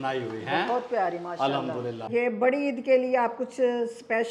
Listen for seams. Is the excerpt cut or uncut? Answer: cut